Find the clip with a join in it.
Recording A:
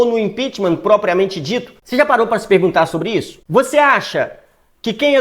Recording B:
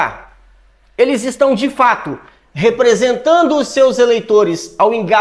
A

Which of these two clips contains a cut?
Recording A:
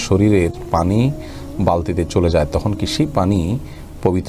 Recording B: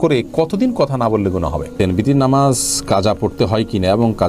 B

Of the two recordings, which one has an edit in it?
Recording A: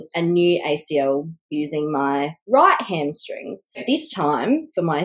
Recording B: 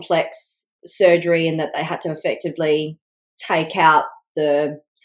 A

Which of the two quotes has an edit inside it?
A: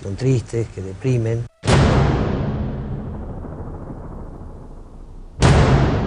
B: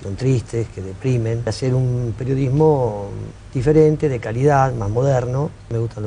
A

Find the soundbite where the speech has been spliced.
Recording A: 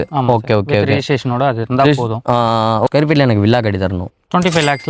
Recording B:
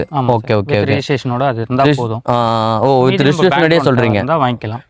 A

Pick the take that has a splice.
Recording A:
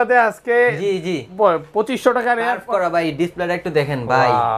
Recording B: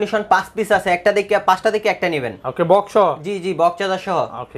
A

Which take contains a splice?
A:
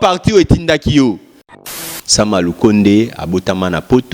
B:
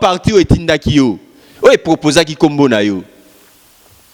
A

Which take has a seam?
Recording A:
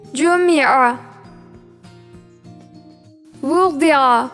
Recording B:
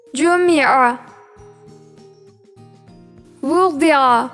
B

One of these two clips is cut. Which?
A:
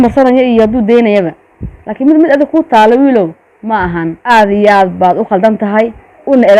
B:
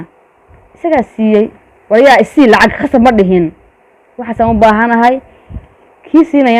A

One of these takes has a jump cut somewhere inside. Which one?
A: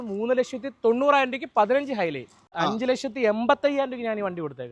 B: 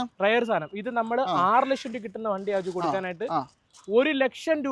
A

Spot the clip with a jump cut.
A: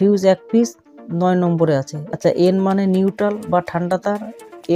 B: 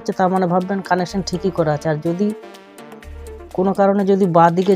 A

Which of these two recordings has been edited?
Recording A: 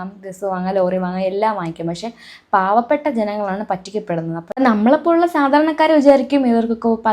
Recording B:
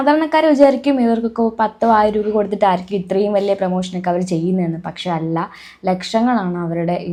A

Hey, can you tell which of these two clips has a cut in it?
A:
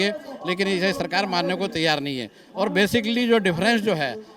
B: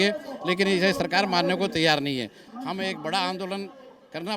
B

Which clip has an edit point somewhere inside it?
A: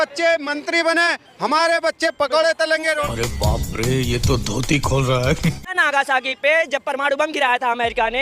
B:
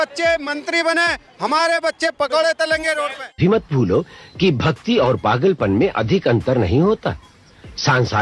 A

